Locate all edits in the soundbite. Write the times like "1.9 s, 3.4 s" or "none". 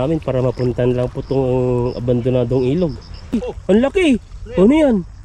3.5 s